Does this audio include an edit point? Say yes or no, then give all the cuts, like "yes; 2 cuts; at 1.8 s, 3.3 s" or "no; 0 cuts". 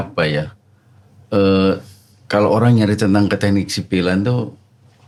no; 0 cuts